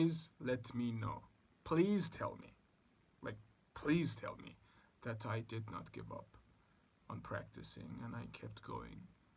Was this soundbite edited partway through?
no; 0 cuts

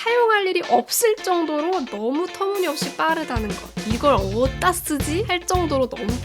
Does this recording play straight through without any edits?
no; 1 cut; at 3.8 s

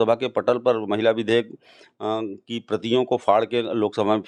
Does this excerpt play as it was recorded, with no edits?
yes; 0 cuts

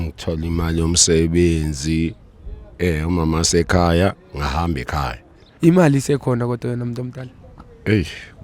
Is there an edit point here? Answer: yes; 1 cut; at 5.4 s

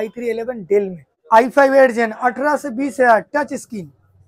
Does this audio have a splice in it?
yes; 1 cut; at 1.1 s

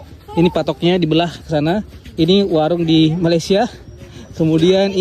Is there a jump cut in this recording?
no; 0 cuts

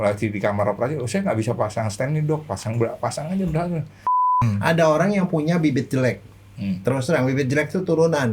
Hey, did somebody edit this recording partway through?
yes; 1 cut; at 4.4 s

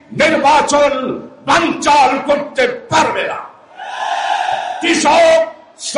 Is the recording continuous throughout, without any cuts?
no; 1 cut; at 4.7 s

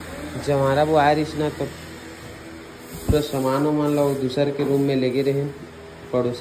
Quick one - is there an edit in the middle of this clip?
no; 0 cuts

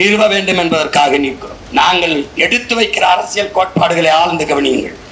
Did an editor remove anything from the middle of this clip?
yes; 1 cut; at 1.5 s

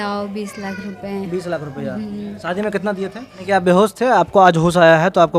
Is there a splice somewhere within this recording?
yes; 1 cut; at 3.3 s

